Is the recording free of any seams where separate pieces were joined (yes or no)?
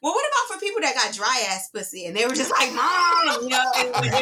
yes